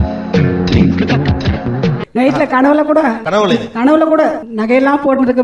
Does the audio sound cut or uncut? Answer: cut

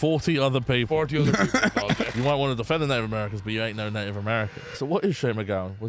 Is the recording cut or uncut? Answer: cut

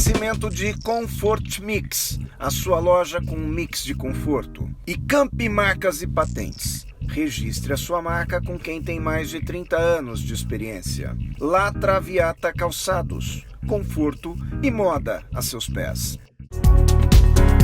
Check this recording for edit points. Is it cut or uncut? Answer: cut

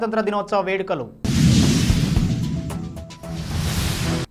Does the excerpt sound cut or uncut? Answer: uncut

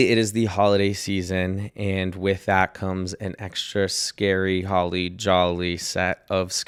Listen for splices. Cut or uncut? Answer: uncut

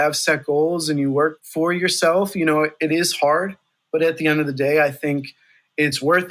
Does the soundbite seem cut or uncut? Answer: uncut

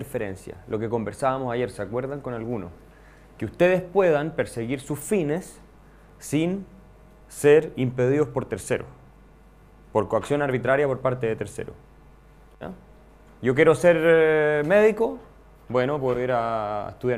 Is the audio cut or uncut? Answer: uncut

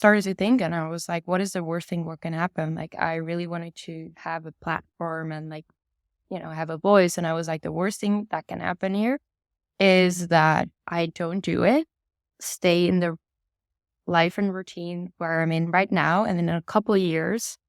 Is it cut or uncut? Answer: uncut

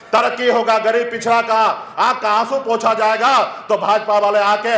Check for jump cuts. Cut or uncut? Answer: uncut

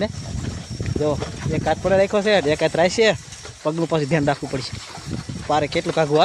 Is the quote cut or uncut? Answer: uncut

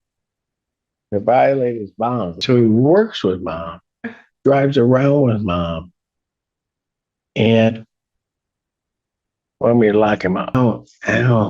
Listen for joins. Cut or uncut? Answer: cut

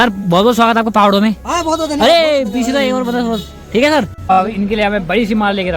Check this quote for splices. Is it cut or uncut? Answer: cut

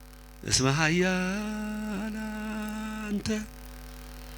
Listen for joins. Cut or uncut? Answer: uncut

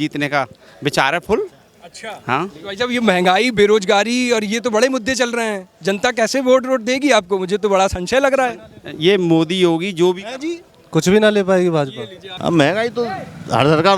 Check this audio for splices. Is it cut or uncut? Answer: cut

